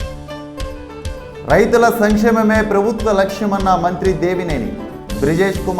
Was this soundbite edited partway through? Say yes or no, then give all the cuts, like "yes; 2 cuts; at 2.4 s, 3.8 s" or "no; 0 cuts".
no; 0 cuts